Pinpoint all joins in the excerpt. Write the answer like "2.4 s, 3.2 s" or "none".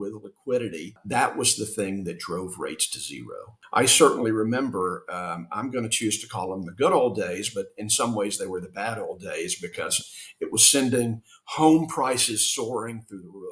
1.0 s, 3.5 s

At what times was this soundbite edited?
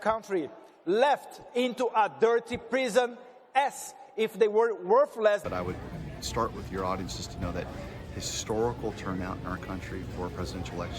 5.4 s

